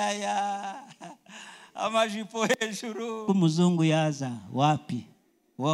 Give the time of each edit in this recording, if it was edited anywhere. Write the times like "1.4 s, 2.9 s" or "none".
3.2 s